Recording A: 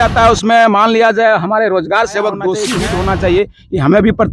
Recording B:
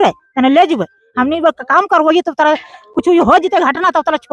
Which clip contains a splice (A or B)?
A